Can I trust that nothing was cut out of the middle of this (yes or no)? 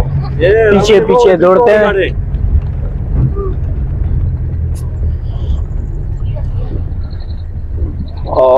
yes